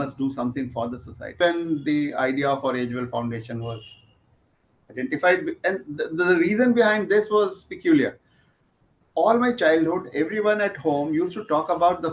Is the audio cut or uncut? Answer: cut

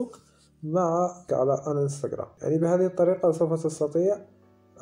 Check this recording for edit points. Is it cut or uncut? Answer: cut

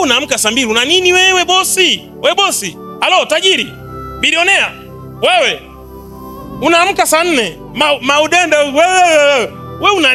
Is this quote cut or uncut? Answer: uncut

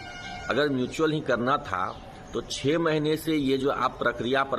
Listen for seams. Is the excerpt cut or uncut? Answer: uncut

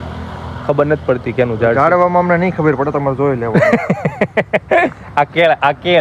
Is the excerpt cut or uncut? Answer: uncut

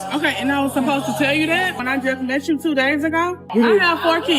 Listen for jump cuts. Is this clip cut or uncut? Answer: cut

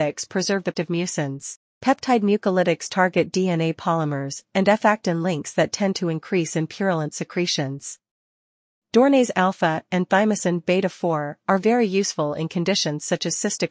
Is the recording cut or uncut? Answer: cut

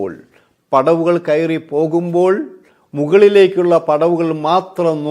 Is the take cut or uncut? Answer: uncut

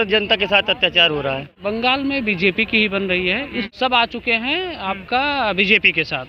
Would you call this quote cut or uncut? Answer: cut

